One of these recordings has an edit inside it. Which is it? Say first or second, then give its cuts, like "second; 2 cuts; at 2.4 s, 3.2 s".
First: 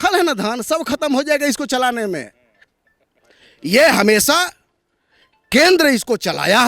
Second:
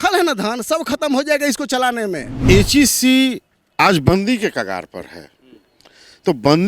second; 1 cut; at 2.3 s